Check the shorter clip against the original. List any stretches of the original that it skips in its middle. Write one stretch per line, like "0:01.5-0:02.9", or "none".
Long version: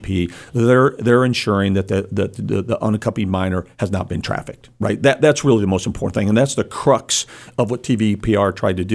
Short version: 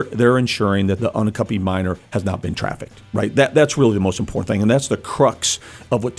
0:01.9-0:02.7